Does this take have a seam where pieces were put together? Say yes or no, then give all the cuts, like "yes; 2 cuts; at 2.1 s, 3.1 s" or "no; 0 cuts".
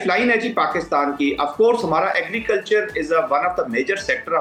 no; 0 cuts